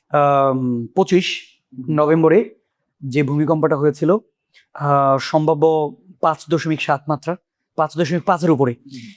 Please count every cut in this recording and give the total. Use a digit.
0